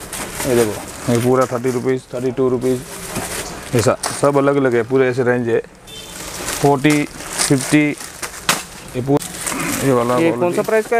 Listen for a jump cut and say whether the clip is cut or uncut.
uncut